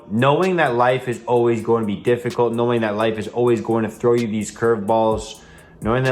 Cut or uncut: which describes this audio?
uncut